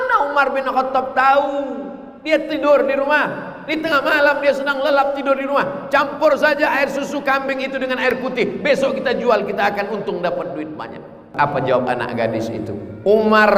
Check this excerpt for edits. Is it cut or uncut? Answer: cut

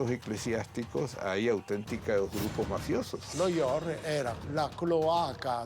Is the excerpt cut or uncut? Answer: cut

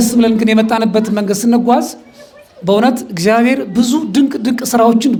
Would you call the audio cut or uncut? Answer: uncut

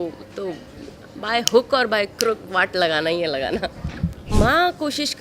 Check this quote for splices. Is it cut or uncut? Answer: cut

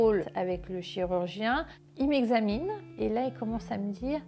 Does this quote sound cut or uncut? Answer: cut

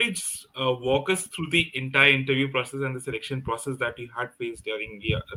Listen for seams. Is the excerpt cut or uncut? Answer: uncut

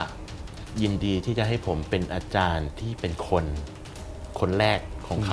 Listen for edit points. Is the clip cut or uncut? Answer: uncut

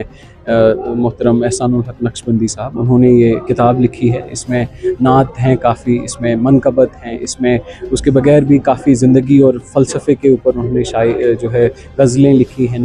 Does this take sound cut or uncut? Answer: uncut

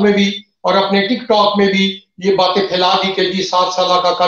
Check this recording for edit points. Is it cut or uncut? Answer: uncut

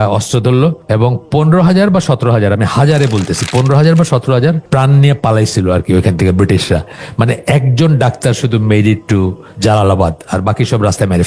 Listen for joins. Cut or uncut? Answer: cut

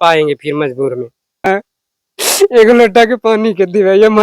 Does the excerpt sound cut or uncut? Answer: cut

